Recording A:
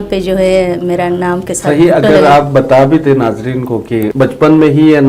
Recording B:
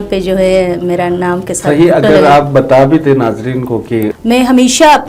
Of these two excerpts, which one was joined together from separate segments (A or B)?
B